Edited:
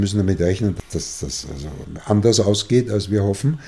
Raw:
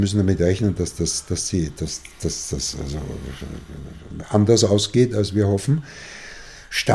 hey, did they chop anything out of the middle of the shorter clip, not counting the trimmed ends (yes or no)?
yes